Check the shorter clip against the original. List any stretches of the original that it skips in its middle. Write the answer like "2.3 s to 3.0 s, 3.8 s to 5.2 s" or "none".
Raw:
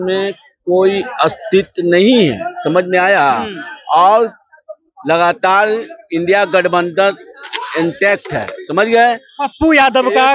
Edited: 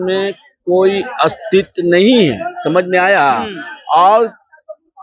none